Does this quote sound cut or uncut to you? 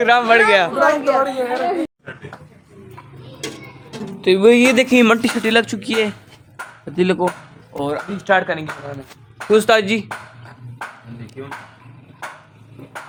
uncut